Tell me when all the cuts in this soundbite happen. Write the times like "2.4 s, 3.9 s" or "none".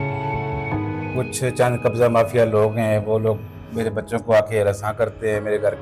1.1 s